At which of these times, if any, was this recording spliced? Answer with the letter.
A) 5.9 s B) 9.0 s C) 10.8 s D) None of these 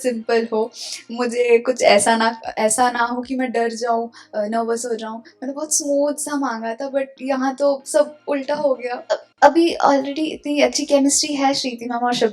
B